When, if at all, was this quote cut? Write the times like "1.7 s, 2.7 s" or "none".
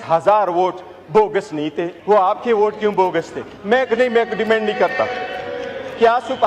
1.9 s